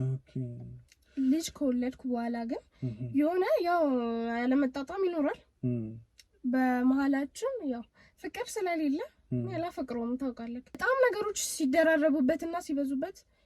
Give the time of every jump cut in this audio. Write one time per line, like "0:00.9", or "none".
0:10.8